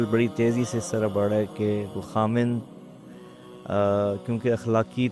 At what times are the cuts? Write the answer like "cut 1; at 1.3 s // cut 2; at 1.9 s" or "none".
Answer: none